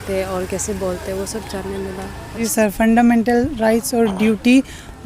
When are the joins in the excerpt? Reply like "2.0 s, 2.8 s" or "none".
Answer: 2.4 s

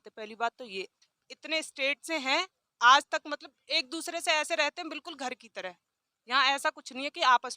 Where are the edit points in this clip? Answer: 1.1 s

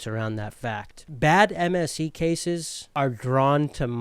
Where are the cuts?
1.0 s, 2.8 s

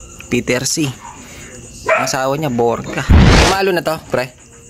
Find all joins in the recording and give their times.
3.2 s

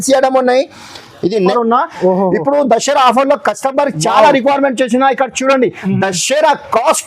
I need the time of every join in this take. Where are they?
1.5 s

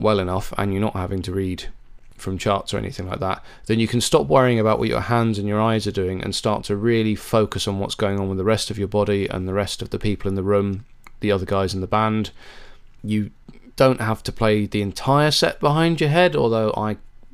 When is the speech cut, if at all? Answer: none

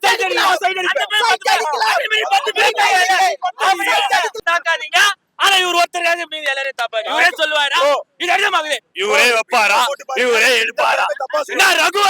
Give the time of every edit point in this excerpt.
4.3 s

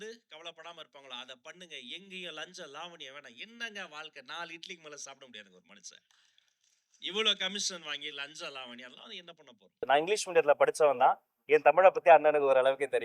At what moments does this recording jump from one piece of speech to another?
9.9 s

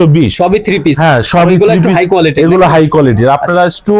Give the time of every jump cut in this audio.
none

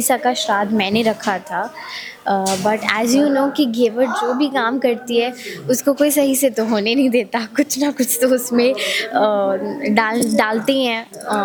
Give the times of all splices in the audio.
none

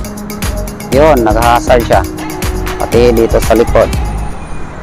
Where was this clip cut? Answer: none

